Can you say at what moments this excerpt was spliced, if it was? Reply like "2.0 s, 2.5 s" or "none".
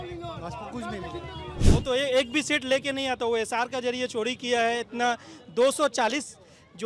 1.5 s